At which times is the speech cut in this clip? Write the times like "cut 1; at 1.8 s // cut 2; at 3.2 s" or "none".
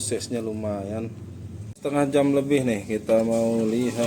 cut 1; at 1.8 s